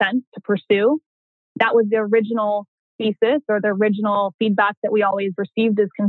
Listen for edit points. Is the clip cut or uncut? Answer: uncut